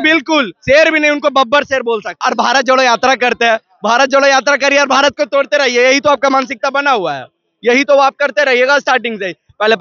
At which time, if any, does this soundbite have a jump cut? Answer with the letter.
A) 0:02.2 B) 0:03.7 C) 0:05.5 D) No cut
A